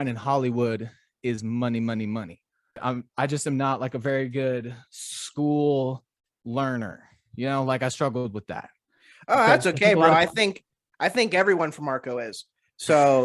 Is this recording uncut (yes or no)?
no